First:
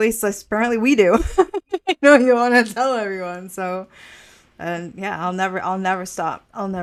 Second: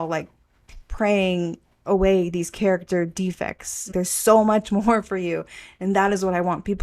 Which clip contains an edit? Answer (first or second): second